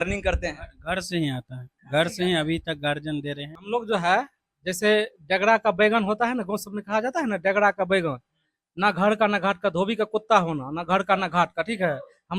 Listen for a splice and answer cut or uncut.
cut